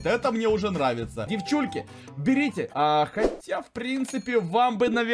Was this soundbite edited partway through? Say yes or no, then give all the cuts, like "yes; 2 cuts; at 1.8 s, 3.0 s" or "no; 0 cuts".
yes; 1 cut; at 1.3 s